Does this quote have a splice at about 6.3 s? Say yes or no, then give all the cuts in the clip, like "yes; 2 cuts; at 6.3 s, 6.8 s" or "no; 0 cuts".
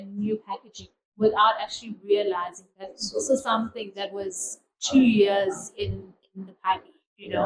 no; 0 cuts